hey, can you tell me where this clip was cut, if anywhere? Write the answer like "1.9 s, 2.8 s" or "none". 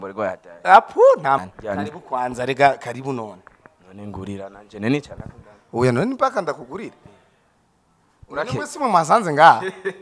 1.4 s